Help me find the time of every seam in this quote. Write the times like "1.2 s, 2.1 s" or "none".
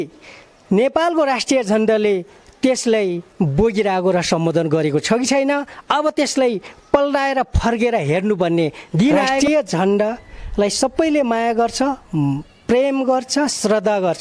9.4 s

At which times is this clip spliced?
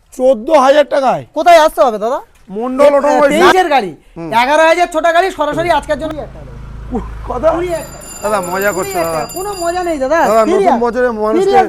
3.3 s, 6.1 s

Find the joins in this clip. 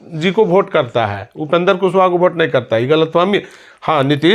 none

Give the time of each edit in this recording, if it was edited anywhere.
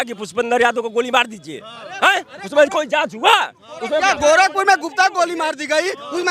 4.0 s

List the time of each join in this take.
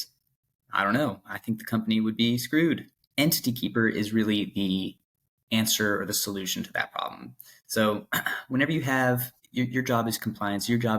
2.9 s, 9.4 s

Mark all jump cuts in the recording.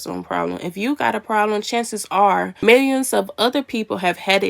2.5 s

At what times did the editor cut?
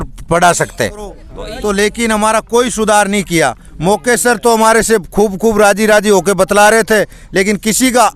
1.3 s

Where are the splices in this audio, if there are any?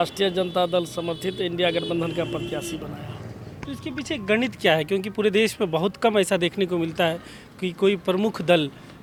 none

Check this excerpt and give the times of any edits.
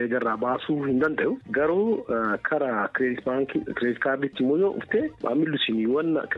5.2 s

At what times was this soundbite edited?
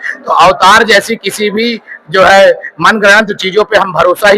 none

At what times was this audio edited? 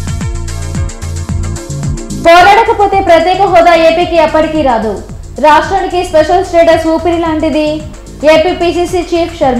2.2 s

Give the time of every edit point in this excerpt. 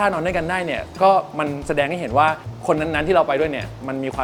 none

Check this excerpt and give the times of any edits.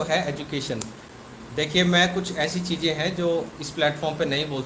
1.1 s

